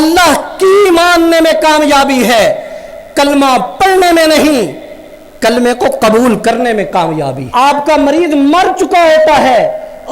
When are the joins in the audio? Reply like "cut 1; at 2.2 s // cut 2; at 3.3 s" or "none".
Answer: cut 1; at 7.5 s

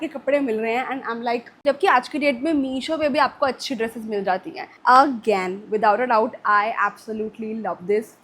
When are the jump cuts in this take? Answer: cut 1; at 1.5 s // cut 2; at 4.6 s

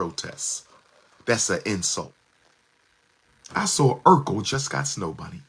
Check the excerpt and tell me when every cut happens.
cut 1; at 2.2 s

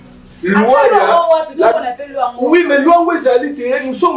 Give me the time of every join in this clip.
none

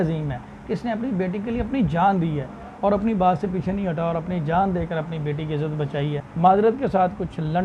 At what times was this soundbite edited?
cut 1; at 6.2 s

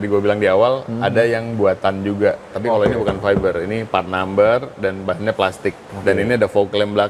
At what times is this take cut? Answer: cut 1; at 2.5 s // cut 2; at 5.9 s

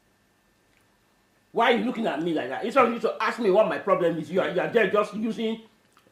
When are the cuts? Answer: none

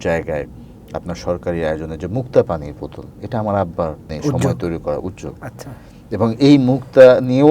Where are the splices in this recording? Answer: cut 1; at 4.1 s

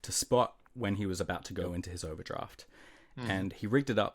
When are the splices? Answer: cut 1; at 1.7 s

